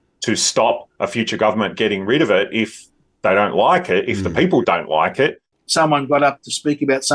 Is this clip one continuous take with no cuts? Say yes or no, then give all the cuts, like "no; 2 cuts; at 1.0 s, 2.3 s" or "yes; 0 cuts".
no; 1 cut; at 5.5 s